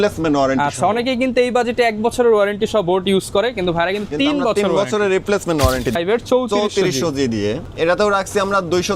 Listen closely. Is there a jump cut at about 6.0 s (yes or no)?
yes